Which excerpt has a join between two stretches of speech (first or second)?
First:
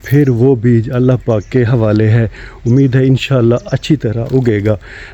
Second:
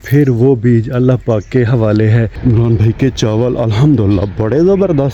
second